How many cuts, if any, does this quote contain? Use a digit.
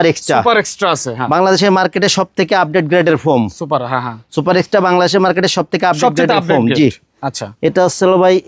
0